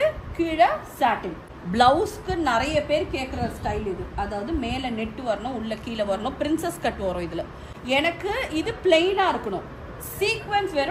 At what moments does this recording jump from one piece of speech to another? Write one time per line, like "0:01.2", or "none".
0:01.4
0:07.7